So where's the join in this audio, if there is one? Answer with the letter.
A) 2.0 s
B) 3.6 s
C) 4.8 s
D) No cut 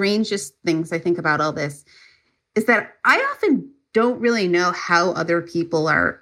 D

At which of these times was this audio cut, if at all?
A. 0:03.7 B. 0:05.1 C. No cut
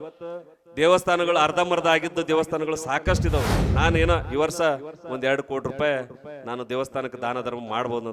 A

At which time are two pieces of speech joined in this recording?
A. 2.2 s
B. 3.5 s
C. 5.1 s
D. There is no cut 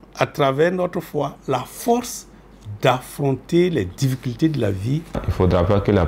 C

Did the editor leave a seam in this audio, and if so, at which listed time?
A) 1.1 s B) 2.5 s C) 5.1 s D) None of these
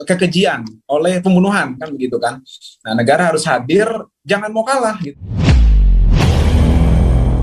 C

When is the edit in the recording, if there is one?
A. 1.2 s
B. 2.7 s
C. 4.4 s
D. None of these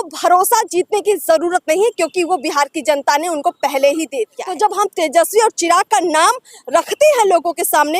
C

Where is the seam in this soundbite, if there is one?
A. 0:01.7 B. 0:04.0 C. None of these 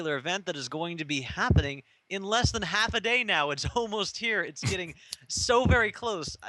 C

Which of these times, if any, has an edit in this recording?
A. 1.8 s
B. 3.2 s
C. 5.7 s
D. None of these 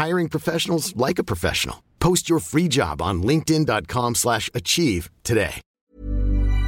C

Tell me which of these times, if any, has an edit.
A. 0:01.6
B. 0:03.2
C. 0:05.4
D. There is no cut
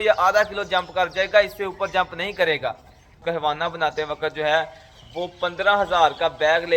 B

